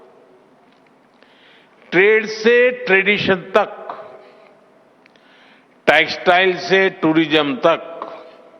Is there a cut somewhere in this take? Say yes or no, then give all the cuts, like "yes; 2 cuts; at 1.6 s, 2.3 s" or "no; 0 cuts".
no; 0 cuts